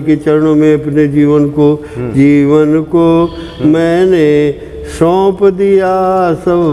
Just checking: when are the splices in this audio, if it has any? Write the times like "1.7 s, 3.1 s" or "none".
none